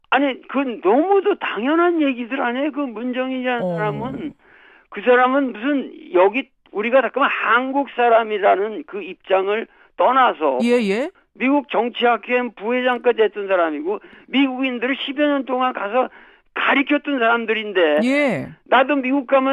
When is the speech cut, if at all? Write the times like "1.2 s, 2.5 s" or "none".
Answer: 16.9 s